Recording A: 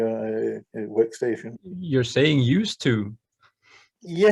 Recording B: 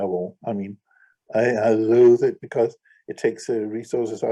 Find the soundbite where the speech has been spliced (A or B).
A